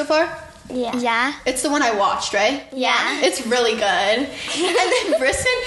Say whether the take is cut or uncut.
cut